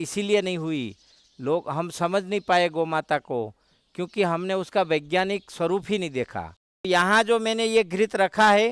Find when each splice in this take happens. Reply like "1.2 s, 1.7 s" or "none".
6.9 s